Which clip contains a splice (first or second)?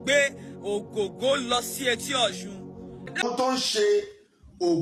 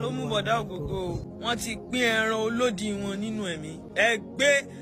first